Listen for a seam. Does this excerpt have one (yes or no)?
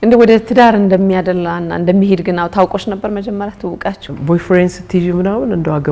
yes